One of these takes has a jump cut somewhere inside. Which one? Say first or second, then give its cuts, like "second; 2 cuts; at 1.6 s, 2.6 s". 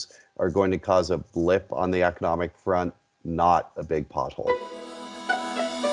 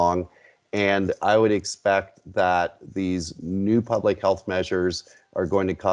first; 1 cut; at 4.5 s